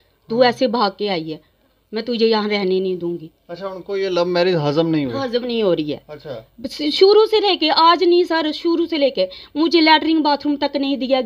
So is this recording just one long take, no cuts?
yes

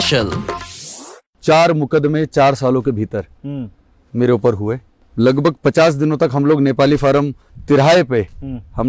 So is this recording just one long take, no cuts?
no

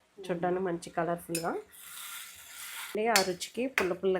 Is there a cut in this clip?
yes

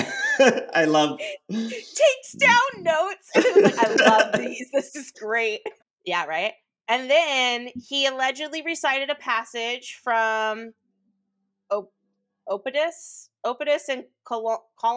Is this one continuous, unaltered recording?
no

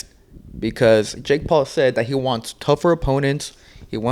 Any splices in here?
no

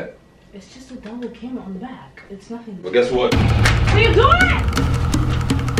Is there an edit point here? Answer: no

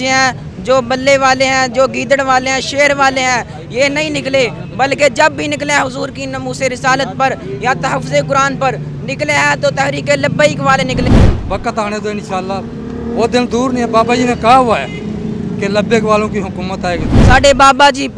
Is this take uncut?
no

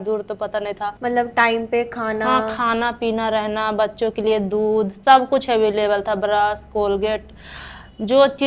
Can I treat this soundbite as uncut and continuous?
no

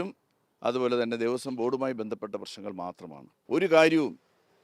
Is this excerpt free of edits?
no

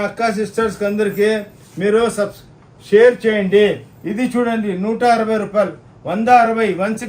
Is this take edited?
no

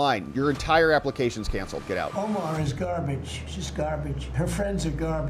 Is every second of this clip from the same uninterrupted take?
no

